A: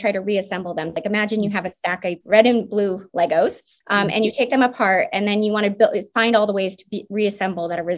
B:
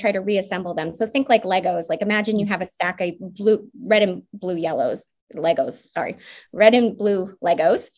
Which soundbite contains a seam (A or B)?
A